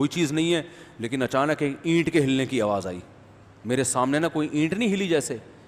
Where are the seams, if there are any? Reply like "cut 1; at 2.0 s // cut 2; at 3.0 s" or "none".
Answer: none